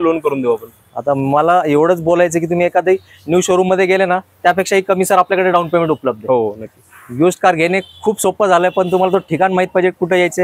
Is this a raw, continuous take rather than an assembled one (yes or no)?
yes